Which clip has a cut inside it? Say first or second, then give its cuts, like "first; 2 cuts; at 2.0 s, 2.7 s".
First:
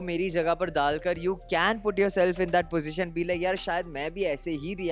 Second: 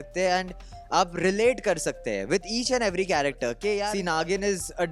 second; 1 cut; at 3.9 s